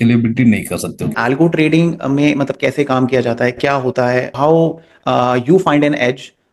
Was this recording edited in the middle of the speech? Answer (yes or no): yes